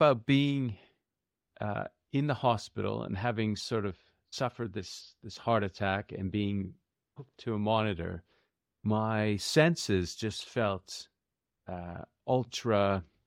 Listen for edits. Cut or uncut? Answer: uncut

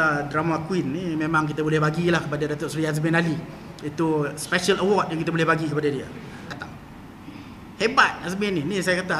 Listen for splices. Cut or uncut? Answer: cut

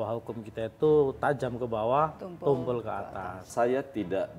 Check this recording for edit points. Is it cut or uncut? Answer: cut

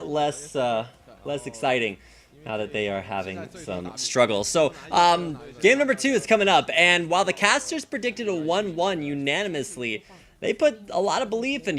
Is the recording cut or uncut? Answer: uncut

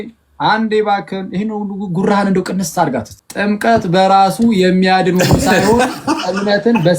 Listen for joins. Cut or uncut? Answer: cut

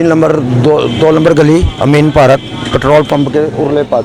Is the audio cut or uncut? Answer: uncut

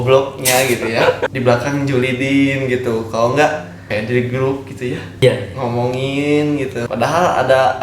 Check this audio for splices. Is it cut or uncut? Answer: cut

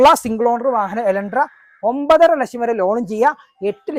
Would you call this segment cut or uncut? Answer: uncut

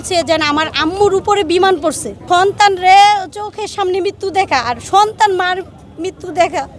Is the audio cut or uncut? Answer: cut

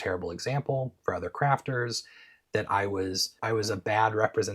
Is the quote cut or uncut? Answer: cut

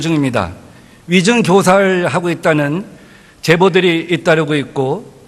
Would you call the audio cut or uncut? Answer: uncut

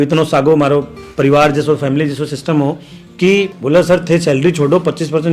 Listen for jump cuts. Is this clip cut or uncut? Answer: cut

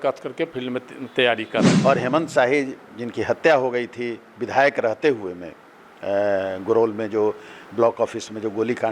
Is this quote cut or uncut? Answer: cut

